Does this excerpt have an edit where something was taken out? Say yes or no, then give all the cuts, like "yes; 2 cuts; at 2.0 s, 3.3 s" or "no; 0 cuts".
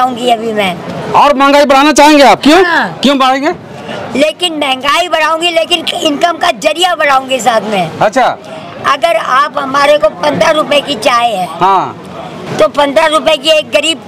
no; 0 cuts